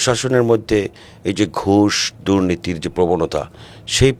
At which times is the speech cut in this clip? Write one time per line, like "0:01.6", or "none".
none